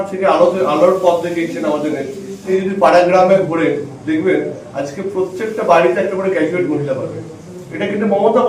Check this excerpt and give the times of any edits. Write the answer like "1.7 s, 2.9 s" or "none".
2.5 s